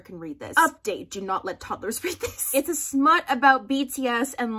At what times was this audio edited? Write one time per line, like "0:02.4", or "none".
0:02.5